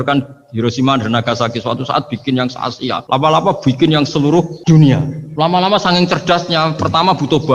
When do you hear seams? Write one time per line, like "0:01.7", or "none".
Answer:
0:03.0
0:04.5
0:05.2